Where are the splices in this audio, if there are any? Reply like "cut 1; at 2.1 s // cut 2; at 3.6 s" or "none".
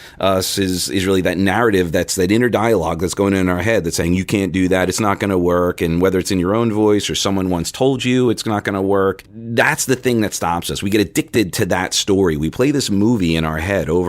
cut 1; at 9.3 s